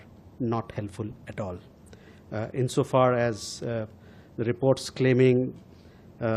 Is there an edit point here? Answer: no; 0 cuts

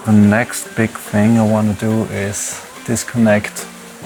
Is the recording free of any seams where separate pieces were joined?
yes; 0 cuts

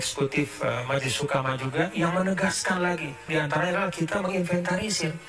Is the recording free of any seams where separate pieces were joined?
no; 1 cut; at 3.3 s

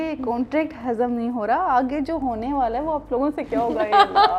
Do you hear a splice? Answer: no; 0 cuts

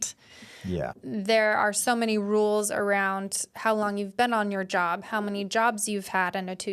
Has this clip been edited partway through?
yes; 1 cut; at 0.9 s

